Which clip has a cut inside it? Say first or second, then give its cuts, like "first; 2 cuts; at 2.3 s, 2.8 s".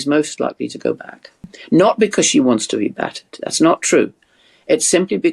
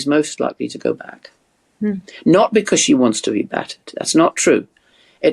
first; 1 cut; at 1.5 s